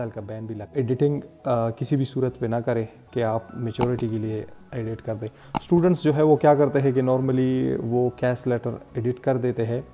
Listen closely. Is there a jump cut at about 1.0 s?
no; 0 cuts

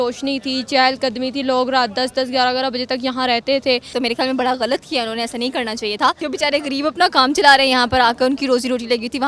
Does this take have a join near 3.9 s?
yes; 2 cuts; at 3.9 s, 6.2 s

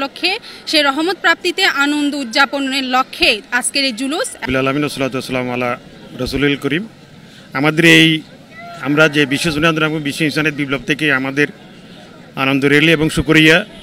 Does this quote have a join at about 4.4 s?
yes; 1 cut; at 4.4 s

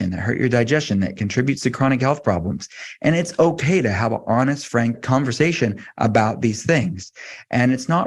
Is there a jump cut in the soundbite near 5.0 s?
yes; 1 cut; at 5.0 s

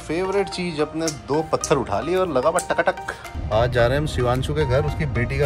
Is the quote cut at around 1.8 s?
no; 1 cut; at 3.3 s

